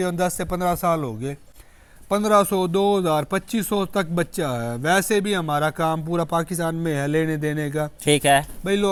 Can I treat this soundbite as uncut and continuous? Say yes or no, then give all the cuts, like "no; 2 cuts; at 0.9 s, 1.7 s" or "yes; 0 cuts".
yes; 0 cuts